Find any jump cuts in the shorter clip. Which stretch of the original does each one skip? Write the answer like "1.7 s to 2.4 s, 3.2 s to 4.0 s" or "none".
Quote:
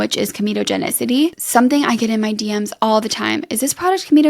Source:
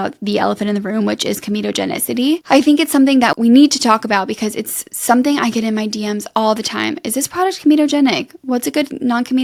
2.4 s to 4.9 s